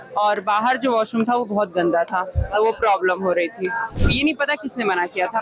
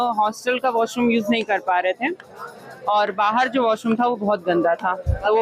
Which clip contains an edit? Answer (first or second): first